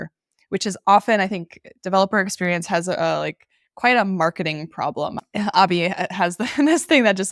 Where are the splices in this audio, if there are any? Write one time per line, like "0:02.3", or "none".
0:05.1